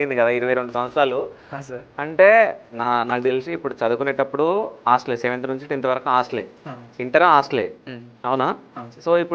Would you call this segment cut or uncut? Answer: uncut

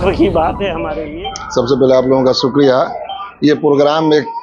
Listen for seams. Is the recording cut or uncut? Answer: cut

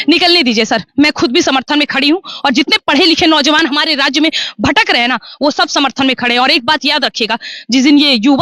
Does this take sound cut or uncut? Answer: uncut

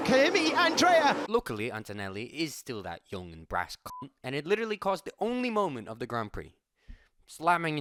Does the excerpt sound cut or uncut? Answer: uncut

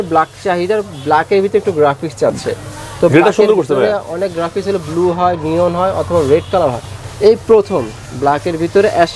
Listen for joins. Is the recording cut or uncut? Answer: uncut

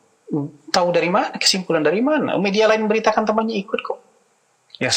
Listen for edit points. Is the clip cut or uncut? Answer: uncut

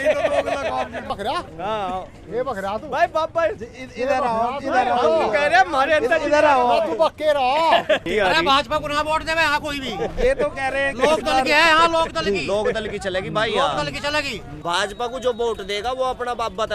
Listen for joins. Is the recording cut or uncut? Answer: cut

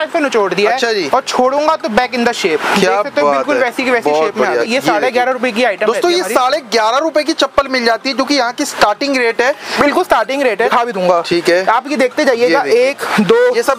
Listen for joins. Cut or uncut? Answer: cut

